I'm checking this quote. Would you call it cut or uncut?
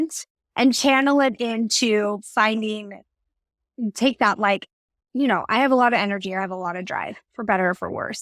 uncut